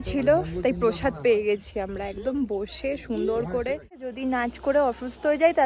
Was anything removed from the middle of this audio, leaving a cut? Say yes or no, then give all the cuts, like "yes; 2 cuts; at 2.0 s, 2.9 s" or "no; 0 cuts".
yes; 1 cut; at 4.1 s